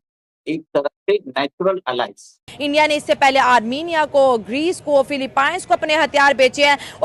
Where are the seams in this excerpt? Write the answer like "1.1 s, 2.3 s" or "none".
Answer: 2.5 s